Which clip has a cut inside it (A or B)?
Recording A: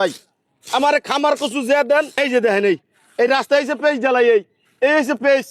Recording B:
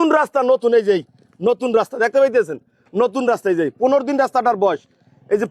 A